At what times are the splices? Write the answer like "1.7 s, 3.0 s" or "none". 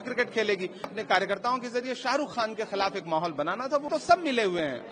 0.9 s, 3.9 s

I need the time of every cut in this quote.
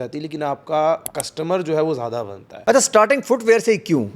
2.6 s

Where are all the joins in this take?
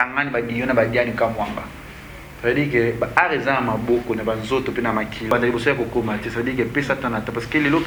5.3 s

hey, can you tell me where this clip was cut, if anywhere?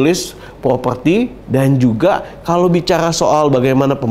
1.4 s

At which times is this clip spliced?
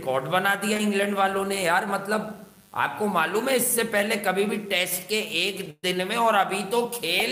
none

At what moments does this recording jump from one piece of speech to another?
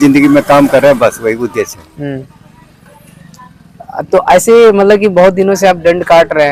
none

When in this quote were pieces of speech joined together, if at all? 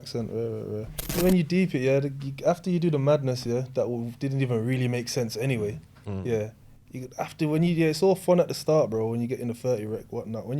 1.2 s

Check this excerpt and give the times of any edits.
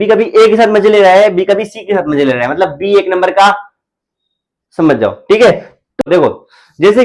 6.0 s

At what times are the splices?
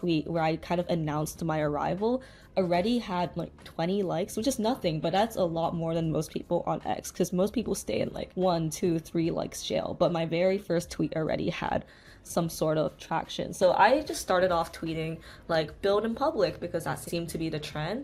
none

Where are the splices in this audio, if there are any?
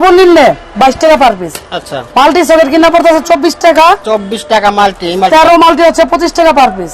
none

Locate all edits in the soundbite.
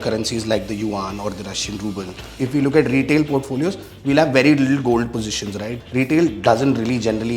2.3 s, 5.8 s

